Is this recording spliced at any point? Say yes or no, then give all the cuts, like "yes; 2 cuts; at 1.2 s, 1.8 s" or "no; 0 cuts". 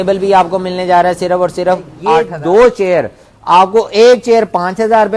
yes; 1 cut; at 2.0 s